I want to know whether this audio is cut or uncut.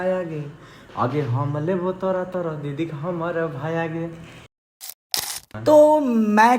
cut